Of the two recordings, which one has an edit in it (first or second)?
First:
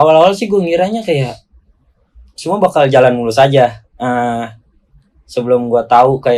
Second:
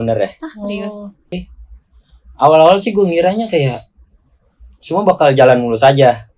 second